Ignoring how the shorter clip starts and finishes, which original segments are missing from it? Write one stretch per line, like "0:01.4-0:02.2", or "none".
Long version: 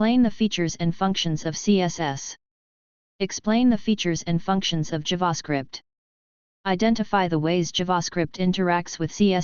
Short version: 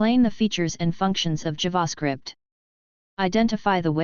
0:01.3-0:04.8

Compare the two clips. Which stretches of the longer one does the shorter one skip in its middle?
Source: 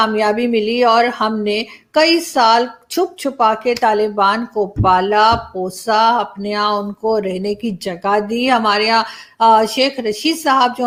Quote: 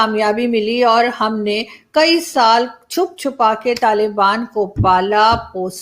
none

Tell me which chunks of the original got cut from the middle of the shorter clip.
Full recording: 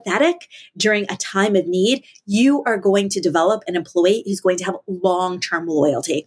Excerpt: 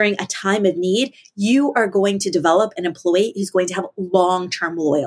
none

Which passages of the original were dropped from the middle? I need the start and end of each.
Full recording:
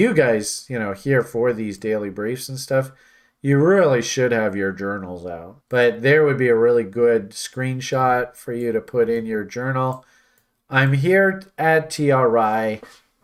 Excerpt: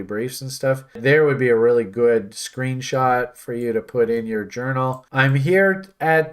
0:03.1-0:06.0
0:10.0-0:10.6

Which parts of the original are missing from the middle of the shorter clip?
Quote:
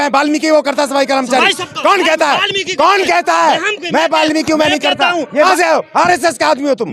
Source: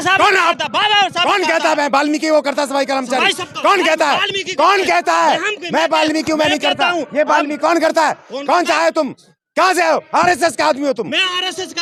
0:07.2-0:09.6

